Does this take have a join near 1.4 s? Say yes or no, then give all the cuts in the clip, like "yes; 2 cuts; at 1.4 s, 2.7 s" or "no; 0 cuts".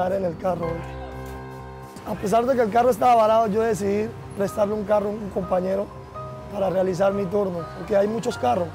yes; 2 cuts; at 1.4 s, 7.7 s